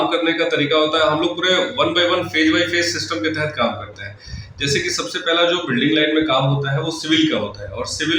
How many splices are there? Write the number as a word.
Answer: zero